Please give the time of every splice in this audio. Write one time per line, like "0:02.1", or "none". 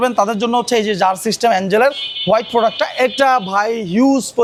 none